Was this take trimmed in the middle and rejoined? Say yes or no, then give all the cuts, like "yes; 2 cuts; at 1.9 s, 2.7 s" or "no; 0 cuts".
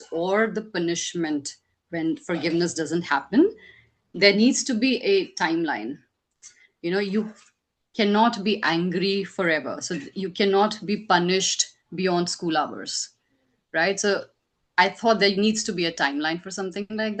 no; 0 cuts